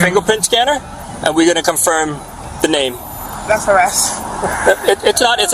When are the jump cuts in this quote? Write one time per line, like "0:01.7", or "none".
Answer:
none